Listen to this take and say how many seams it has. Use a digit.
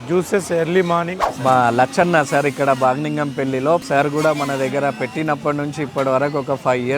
2